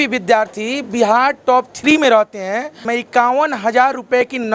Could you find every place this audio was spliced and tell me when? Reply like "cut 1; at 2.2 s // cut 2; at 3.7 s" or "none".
cut 1; at 2.9 s